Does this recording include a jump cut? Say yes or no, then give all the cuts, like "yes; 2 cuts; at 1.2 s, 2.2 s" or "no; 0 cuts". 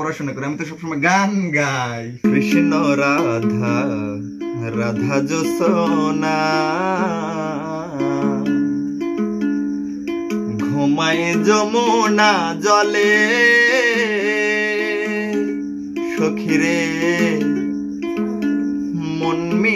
yes; 1 cut; at 2.2 s